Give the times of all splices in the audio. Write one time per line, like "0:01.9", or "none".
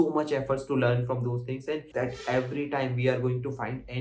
0:01.9